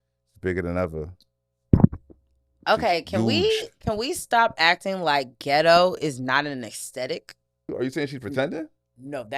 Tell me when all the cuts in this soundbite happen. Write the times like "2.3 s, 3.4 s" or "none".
7.7 s

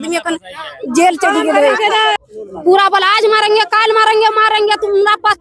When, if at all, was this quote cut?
2.1 s

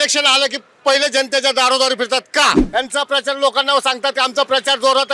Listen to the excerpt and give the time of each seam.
2.6 s

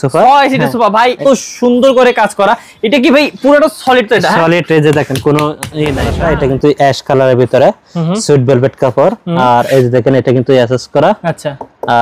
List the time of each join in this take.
1.2 s, 6.1 s

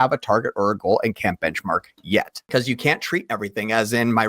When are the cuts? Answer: 2.4 s

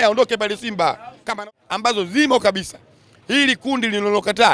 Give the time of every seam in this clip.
1.4 s

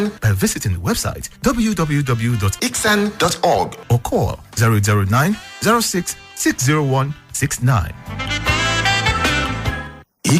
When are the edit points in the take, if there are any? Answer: 9.0 s

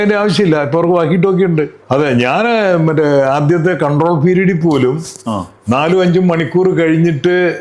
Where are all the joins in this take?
1.8 s

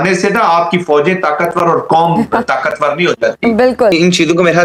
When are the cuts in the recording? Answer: none

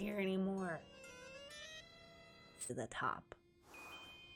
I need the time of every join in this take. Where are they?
2.7 s

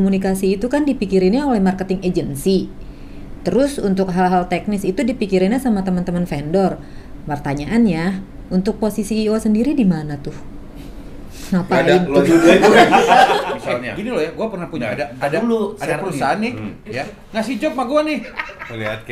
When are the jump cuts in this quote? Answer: 13.5 s

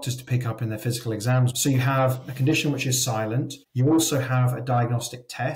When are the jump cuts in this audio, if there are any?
1.5 s

